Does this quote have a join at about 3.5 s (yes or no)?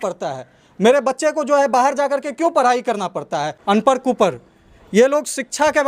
yes